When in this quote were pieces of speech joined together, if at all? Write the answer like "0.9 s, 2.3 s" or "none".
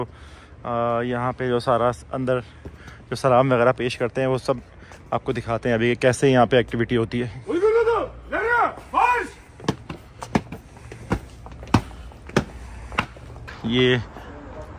13.5 s